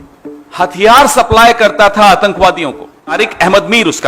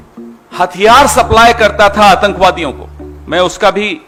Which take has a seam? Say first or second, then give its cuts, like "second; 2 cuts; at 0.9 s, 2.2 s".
first; 1 cut; at 3.1 s